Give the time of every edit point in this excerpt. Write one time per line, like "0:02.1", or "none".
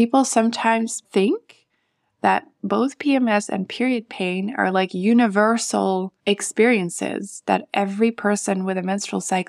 0:01.0
0:06.1